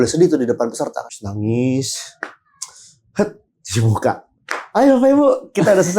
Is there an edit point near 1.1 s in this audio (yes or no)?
yes